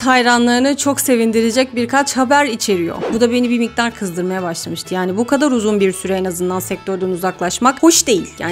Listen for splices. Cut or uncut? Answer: cut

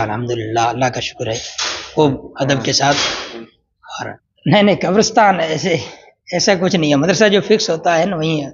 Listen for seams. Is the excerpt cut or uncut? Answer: cut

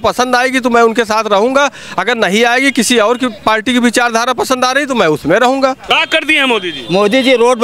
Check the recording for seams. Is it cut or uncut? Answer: cut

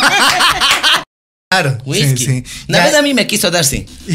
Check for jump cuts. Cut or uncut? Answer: cut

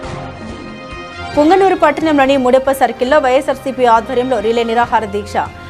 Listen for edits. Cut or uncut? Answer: cut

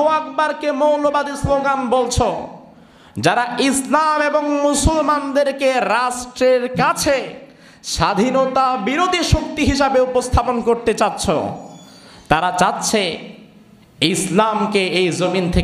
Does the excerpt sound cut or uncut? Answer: uncut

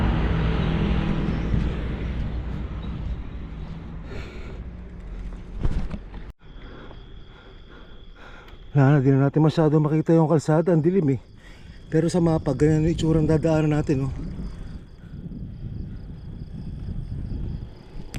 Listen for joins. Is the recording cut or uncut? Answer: uncut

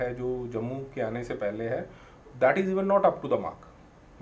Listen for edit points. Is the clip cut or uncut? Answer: uncut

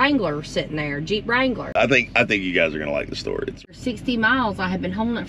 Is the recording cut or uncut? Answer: cut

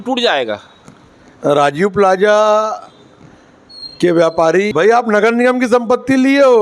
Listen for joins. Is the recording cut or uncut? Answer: cut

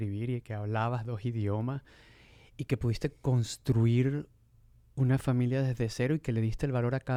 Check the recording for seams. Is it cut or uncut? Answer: uncut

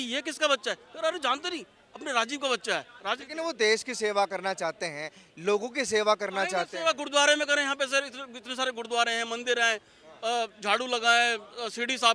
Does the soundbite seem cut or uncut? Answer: cut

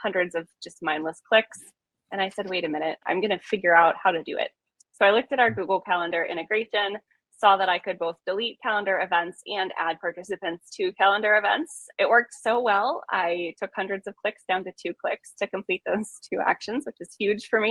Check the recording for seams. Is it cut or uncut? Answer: cut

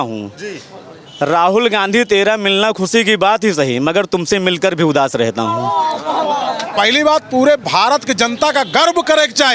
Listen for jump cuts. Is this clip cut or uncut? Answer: cut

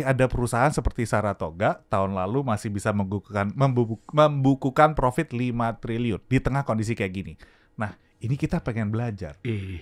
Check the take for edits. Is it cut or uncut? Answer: uncut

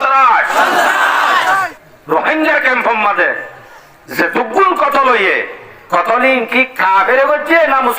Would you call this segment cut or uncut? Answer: cut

